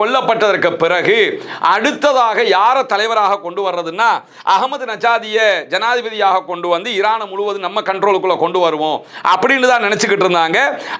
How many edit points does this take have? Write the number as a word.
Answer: zero